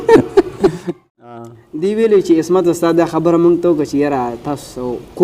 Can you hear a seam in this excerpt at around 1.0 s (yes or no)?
yes